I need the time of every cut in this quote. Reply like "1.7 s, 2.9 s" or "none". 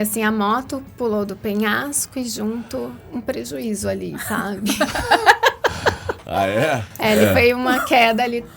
3.0 s